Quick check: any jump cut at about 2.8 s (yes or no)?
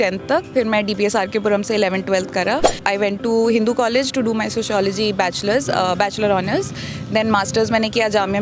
yes